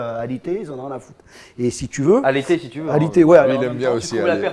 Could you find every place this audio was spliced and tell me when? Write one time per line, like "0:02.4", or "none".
0:03.4